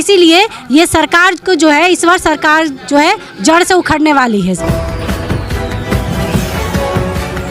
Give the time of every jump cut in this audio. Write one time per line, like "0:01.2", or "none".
0:04.6